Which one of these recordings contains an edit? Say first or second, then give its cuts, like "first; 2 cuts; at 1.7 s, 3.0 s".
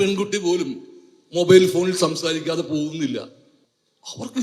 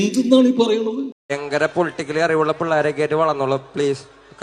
second; 1 cut; at 1.4 s